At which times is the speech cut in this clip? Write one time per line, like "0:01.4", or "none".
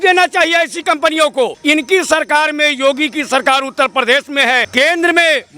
0:01.6
0:04.7